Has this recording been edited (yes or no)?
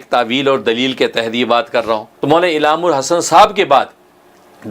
yes